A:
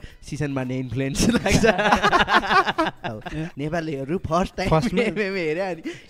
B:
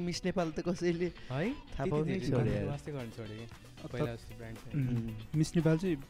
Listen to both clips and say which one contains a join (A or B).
A